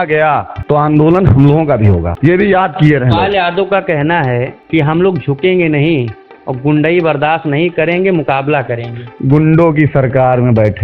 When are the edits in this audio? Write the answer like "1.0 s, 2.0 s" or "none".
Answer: none